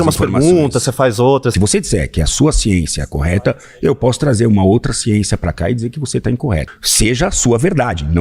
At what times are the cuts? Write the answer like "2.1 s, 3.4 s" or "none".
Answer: 1.5 s, 6.8 s